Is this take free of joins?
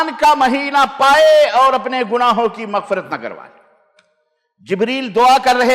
yes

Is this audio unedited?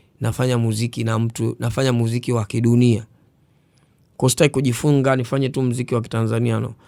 yes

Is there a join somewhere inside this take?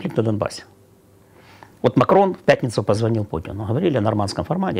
no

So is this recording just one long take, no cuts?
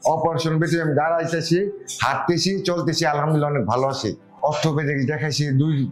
no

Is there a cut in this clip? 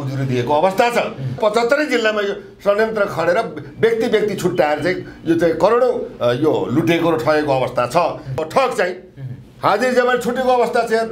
yes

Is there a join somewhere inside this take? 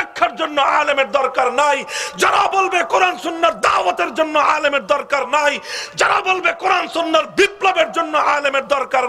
no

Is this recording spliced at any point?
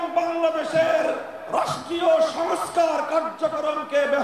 no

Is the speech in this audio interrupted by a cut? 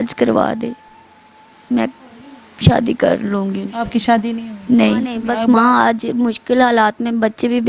yes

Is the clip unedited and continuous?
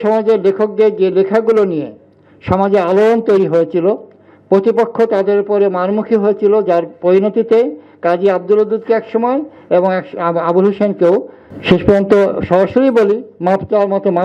yes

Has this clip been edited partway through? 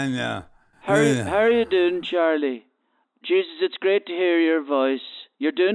no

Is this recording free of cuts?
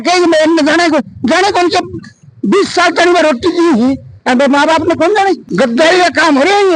no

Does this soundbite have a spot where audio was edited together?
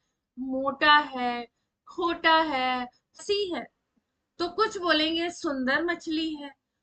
yes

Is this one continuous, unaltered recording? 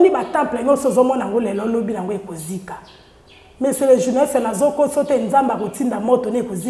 yes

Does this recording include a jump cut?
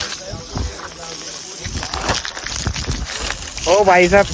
no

